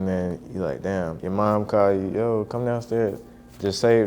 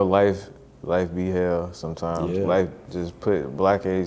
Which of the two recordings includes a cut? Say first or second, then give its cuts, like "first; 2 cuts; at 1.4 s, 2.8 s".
first; 1 cut; at 1.2 s